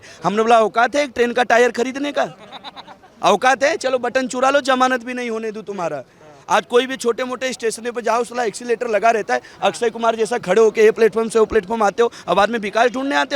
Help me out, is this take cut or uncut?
uncut